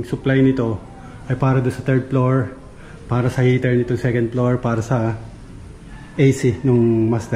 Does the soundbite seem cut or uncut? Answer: uncut